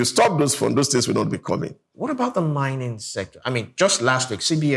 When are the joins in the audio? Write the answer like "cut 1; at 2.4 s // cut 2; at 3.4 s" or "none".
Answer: cut 1; at 1.8 s